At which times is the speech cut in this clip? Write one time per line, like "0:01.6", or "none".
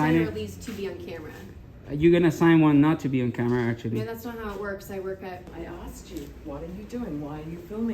0:05.5